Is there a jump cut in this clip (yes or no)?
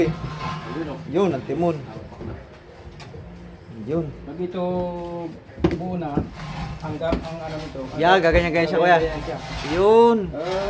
no